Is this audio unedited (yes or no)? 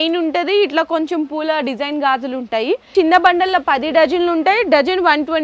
no